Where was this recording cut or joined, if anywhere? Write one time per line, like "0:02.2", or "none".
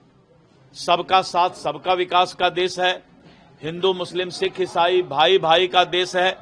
none